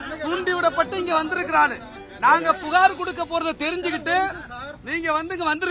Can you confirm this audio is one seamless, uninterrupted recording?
yes; 0 cuts

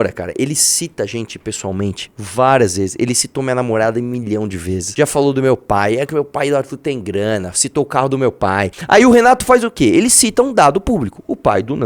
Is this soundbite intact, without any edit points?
no; 2 cuts; at 4.8 s, 8.8 s

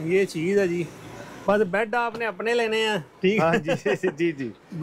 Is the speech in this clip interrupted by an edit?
no; 0 cuts

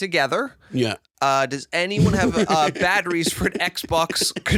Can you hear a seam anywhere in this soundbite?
no; 0 cuts

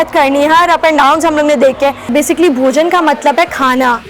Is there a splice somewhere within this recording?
yes; 1 cut; at 2.0 s

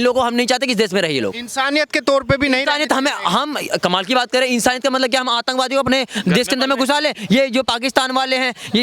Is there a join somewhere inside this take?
no; 0 cuts

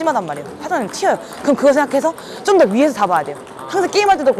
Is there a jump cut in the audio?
no; 0 cuts

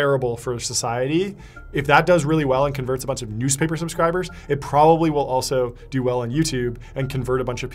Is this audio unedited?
yes; 0 cuts

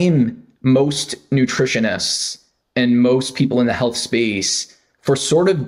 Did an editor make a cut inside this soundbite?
no; 0 cuts

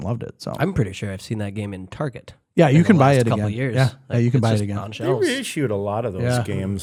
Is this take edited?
no; 0 cuts

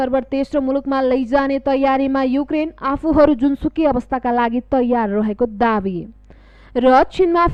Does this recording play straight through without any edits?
yes; 0 cuts

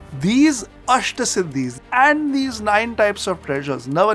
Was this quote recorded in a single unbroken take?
no; 1 cut; at 1.8 s

